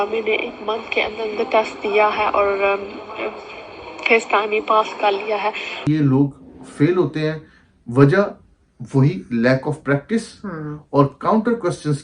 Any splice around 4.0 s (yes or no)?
no